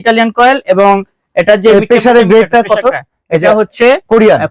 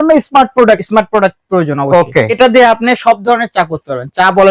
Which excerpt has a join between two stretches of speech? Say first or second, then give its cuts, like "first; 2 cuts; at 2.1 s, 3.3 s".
second; 1 cut; at 2.3 s